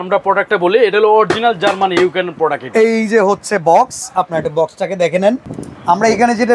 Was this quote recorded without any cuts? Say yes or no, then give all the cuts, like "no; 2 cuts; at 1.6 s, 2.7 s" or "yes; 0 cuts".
yes; 0 cuts